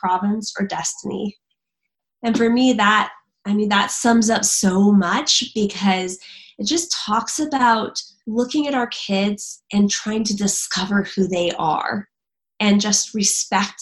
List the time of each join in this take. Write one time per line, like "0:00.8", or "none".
0:07.6